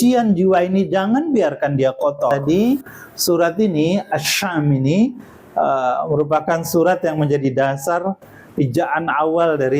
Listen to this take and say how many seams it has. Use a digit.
1